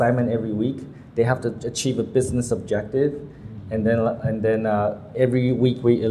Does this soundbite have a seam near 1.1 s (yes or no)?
no